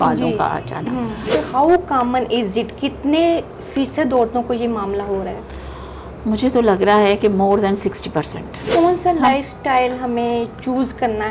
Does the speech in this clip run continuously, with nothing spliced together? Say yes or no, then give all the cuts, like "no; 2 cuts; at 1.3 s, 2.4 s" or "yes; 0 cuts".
no; 2 cuts; at 1.3 s, 8.7 s